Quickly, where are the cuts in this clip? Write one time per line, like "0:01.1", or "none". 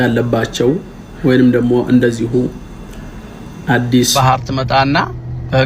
0:04.1